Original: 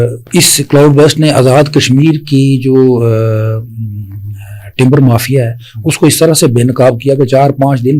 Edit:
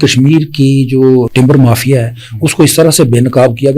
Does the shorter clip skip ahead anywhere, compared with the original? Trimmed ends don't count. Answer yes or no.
yes